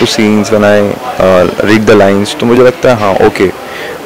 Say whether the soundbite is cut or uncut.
uncut